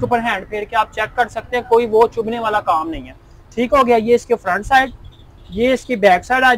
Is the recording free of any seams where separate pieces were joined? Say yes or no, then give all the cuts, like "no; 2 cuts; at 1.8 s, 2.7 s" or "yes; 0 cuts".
yes; 0 cuts